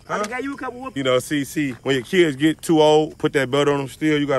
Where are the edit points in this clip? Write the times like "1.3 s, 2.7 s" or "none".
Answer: 1.0 s, 1.8 s, 2.6 s, 3.1 s